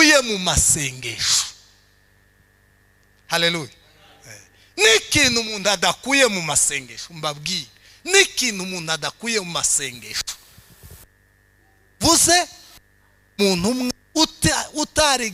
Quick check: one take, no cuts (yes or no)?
yes